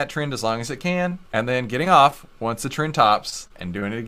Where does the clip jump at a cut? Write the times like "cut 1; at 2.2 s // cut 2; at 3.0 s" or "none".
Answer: cut 1; at 1.2 s